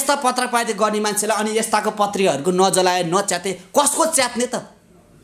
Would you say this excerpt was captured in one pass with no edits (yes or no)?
yes